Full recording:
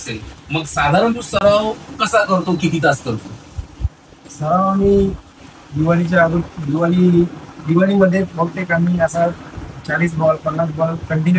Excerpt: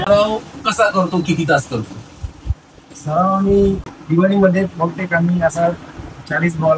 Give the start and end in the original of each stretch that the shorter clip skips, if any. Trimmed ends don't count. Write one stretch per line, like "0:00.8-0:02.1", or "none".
0:05.3-0:07.5